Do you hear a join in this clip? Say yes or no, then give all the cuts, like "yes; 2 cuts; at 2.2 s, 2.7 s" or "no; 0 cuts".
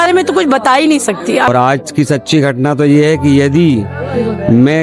yes; 1 cut; at 1.5 s